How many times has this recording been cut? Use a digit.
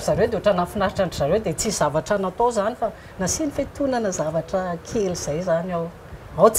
0